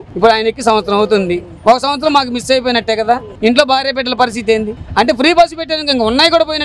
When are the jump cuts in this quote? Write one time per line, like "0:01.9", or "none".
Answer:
0:03.3
0:04.8